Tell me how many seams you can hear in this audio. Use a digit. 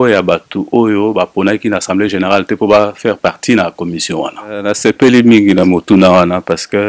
1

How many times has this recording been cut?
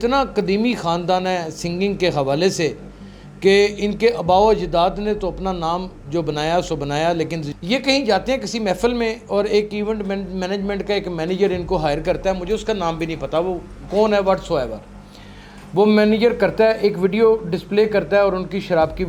1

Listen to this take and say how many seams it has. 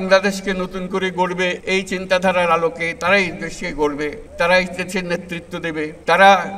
2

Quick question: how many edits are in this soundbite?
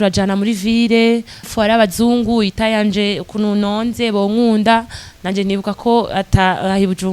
1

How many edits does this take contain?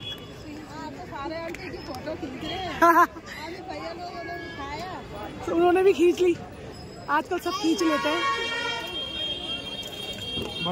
0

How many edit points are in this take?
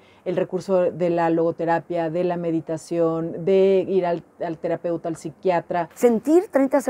1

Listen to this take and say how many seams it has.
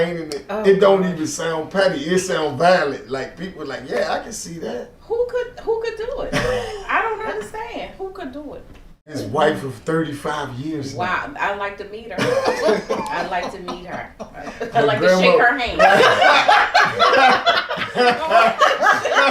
1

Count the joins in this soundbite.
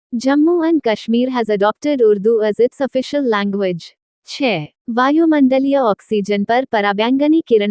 1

